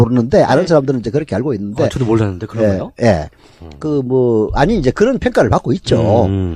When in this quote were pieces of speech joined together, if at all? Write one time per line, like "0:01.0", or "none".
0:03.0